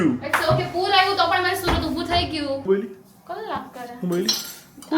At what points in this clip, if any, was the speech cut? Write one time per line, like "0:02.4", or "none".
0:02.6